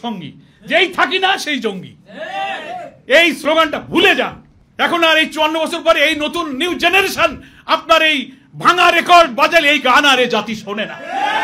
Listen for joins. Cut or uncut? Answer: uncut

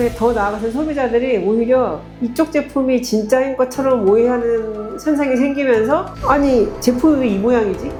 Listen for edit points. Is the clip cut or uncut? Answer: uncut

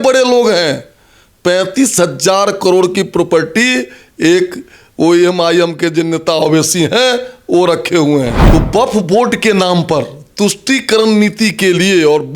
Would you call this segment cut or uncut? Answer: cut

